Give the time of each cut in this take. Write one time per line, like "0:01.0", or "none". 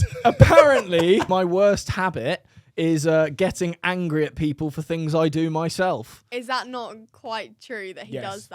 0:01.3